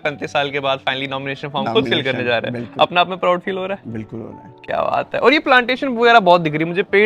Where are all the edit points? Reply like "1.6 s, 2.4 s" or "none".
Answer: none